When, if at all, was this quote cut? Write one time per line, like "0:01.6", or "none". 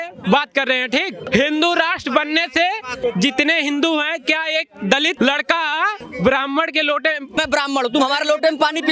0:01.2
0:02.9
0:05.1
0:06.0
0:07.4